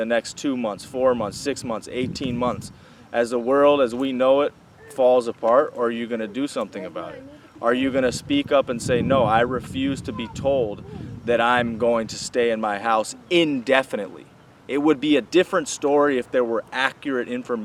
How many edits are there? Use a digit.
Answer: 0